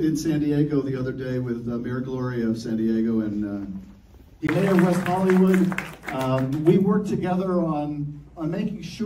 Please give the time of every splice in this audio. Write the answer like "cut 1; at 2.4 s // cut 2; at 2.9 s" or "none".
none